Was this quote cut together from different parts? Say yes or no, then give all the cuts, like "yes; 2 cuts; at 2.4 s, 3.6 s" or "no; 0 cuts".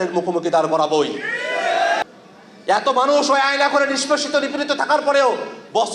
yes; 1 cut; at 2.0 s